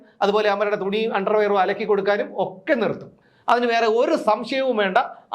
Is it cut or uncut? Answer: uncut